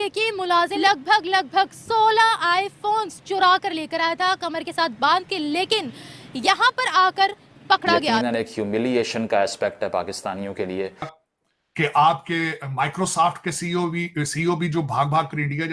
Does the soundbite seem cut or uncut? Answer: cut